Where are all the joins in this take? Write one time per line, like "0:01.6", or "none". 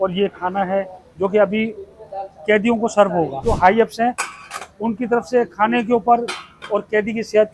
0:03.4